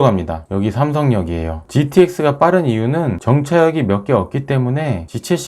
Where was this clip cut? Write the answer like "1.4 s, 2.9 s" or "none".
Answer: 3.2 s